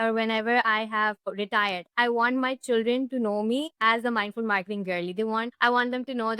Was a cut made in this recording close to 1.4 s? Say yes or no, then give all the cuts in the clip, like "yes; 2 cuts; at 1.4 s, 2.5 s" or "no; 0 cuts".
yes; 3 cuts; at 1.4 s, 3.7 s, 5.5 s